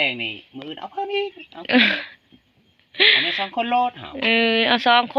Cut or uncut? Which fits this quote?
uncut